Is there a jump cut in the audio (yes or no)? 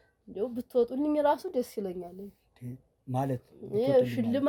no